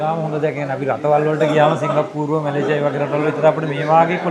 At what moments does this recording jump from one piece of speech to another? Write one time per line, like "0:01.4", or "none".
none